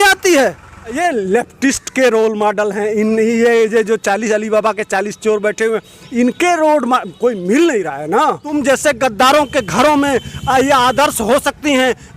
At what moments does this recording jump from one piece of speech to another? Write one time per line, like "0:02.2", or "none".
0:01.0
0:08.5